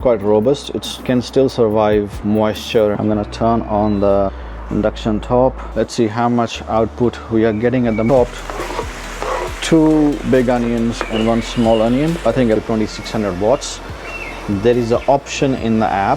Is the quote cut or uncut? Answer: cut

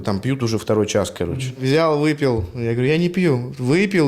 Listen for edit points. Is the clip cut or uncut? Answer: cut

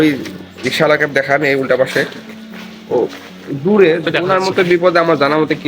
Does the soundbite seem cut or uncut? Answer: cut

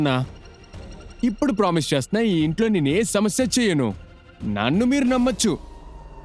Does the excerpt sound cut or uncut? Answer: uncut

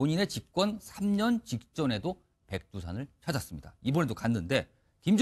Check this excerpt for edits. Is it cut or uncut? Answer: uncut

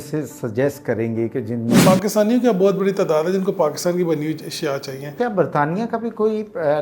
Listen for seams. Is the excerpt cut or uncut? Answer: cut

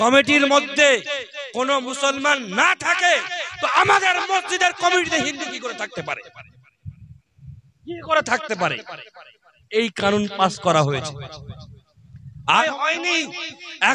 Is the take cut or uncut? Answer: cut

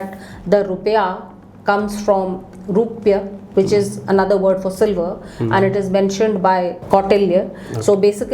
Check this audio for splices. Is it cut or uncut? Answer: cut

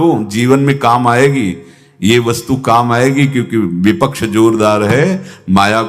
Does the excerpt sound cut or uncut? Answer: uncut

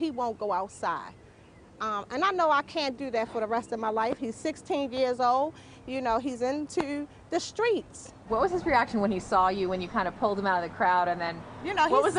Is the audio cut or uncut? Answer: cut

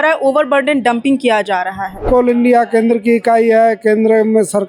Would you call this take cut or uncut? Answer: cut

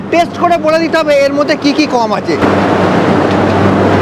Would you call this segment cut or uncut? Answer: cut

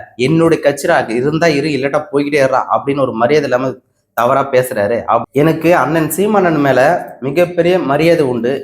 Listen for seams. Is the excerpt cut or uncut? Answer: cut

